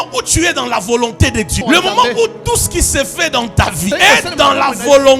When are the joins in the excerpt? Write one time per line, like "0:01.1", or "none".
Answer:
0:01.6
0:03.9